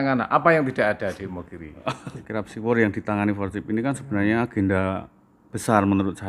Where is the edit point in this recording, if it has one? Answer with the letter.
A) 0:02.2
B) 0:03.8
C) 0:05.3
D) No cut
A